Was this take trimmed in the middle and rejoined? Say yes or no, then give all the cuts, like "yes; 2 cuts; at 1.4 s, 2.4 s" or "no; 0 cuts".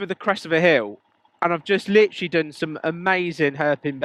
no; 0 cuts